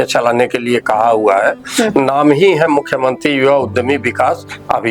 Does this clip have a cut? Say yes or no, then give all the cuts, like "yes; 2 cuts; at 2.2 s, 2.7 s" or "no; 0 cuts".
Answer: no; 0 cuts